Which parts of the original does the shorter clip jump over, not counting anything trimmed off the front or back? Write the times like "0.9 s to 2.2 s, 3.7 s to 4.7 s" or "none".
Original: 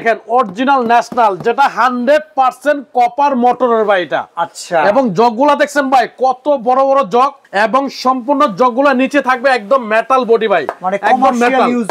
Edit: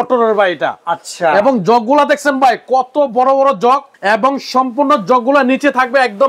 none